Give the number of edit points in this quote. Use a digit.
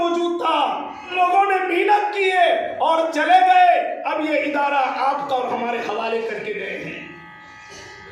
1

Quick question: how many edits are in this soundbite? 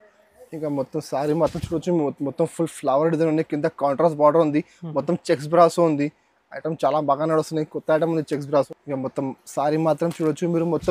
1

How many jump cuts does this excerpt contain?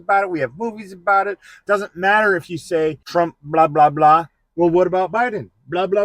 2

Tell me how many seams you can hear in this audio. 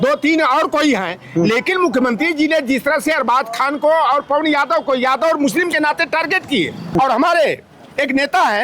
1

